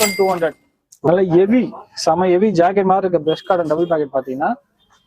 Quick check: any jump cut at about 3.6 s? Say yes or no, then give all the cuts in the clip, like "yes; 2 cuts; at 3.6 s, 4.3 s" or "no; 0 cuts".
no; 1 cut; at 1.1 s